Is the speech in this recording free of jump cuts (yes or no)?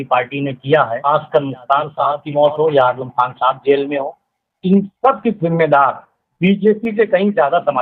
no